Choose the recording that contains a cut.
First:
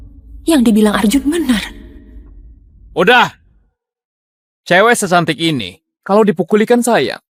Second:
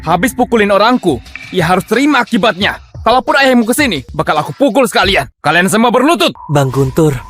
second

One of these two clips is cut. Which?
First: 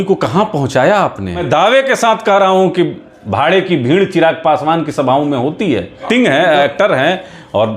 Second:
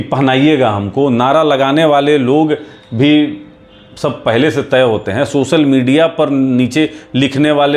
first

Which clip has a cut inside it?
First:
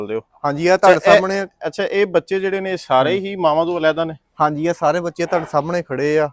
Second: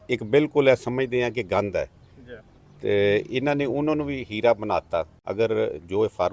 second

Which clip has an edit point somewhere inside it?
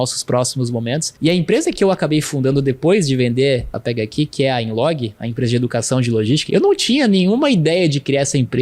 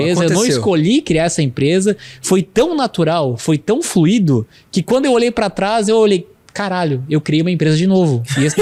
first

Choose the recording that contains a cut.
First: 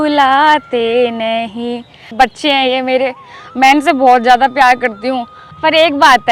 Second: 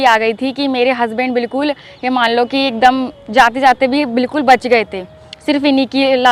first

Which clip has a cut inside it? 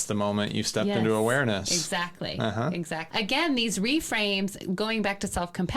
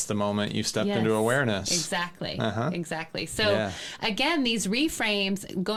first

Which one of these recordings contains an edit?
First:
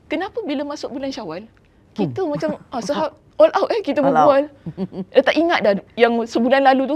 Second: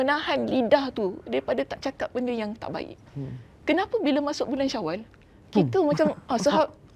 first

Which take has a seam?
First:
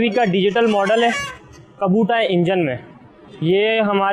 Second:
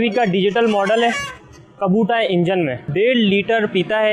second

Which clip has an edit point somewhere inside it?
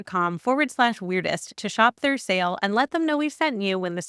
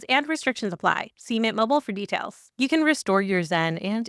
second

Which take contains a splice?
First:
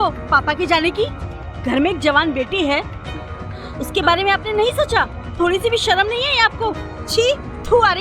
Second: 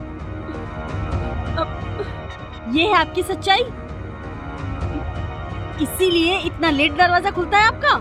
first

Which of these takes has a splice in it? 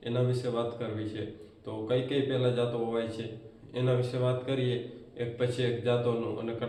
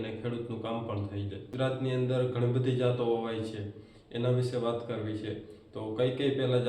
second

